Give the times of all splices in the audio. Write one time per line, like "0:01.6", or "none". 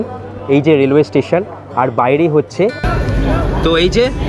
0:02.9